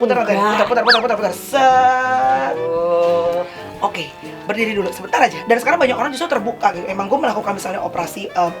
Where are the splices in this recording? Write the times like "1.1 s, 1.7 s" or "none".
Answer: 3.6 s, 5.4 s